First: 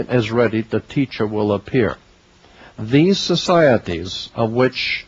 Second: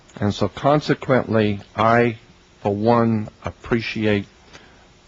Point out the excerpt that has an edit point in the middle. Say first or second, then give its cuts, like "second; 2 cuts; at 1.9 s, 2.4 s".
first; 1 cut; at 3.0 s